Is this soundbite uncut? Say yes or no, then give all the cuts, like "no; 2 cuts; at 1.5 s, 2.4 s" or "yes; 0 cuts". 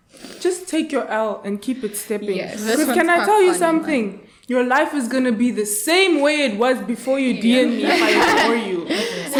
yes; 0 cuts